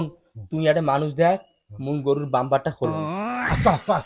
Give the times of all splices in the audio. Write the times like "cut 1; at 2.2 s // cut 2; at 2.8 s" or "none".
none